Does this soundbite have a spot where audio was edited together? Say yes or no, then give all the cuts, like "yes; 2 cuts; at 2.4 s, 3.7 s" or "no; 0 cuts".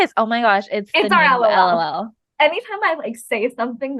yes; 1 cut; at 2.2 s